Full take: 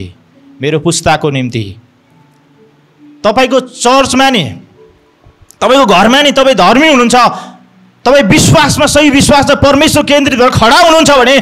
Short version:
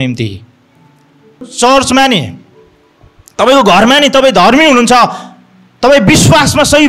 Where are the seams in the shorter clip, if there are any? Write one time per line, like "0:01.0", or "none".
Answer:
0:01.5